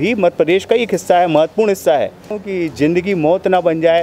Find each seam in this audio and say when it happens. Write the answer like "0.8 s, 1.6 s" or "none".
2.4 s